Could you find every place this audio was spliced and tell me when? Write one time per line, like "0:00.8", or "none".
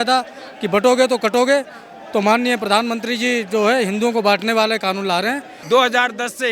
0:05.5